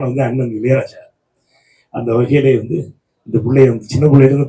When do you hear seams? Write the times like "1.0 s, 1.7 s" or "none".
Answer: none